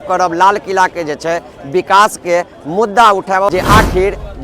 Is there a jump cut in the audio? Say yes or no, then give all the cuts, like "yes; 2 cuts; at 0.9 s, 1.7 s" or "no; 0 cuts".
yes; 1 cut; at 3.5 s